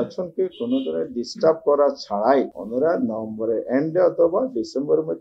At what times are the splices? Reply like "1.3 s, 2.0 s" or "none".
none

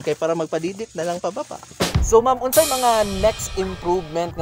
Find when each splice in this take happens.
1.5 s

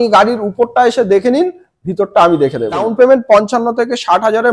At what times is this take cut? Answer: 2.9 s

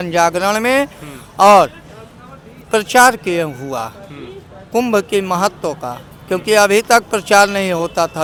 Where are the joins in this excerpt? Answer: none

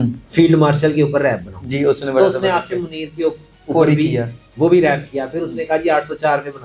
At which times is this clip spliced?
none

